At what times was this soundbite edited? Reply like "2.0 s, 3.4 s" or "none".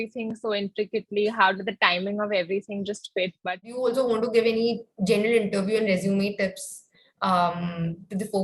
3.4 s

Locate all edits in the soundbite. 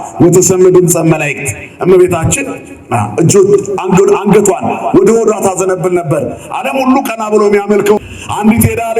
8.0 s

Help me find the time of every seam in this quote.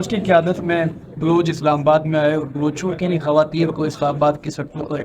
none

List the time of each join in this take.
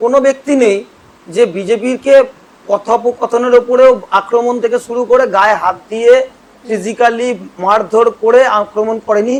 none

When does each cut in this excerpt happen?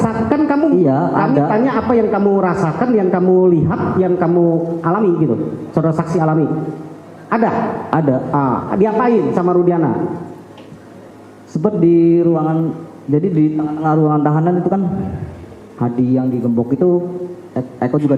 none

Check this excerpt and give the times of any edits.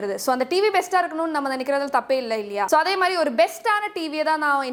none

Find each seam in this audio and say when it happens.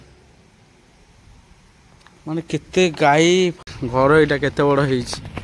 3.6 s

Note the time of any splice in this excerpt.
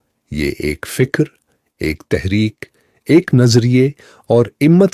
3.5 s

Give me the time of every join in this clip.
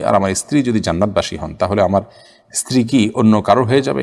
none

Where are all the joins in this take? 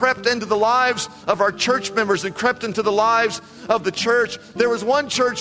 none

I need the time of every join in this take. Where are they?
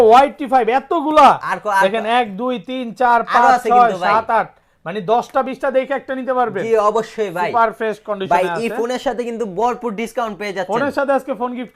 none

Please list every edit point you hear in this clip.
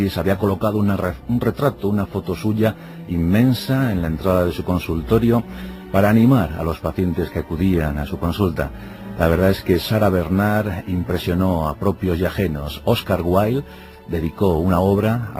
12.0 s

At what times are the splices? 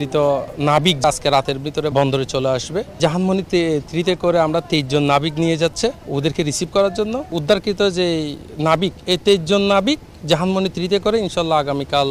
1.0 s, 1.9 s, 3.0 s, 6.0 s, 7.3 s

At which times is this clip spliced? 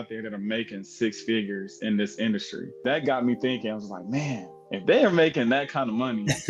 2.7 s

